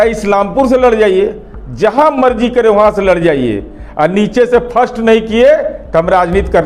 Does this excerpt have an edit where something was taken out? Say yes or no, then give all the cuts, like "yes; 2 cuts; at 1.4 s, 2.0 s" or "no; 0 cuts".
no; 0 cuts